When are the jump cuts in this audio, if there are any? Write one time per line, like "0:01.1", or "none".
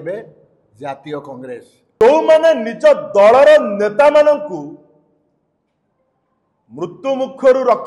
0:02.0